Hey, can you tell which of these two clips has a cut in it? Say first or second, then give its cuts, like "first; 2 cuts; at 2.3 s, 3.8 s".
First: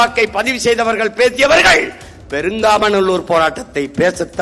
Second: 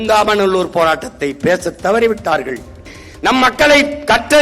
second; 1 cut; at 2.8 s